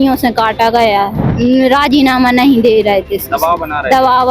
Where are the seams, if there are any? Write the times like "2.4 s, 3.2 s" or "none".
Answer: 1.2 s